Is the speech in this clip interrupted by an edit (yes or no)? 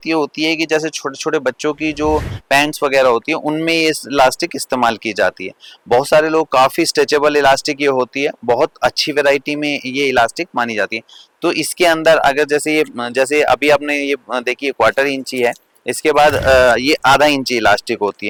no